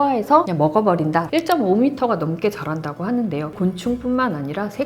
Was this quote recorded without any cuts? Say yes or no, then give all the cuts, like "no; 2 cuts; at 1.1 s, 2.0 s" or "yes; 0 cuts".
no; 2 cuts; at 1.3 s, 3.5 s